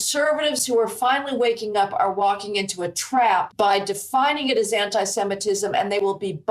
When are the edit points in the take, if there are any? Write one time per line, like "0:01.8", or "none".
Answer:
0:03.5